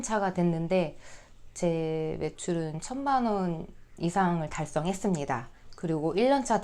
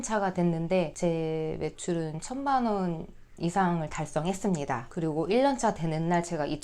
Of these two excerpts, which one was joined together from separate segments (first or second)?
second